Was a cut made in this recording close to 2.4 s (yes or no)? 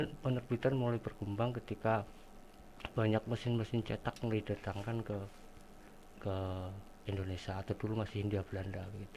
no